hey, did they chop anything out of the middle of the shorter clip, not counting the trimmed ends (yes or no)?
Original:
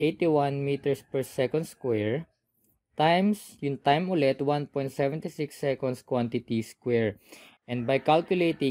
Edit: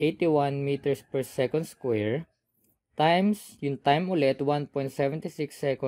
no